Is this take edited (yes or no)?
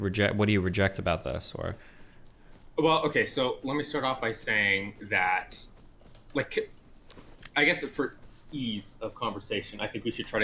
no